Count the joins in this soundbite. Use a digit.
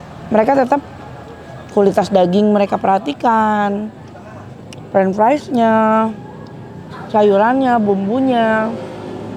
0